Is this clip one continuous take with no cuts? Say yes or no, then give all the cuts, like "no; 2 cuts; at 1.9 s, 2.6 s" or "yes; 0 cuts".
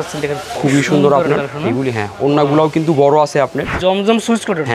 no; 1 cut; at 3.7 s